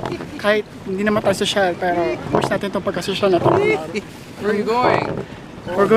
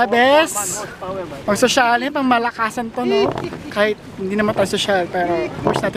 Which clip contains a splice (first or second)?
first